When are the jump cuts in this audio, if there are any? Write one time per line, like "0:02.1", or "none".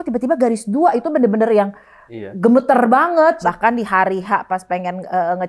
0:03.4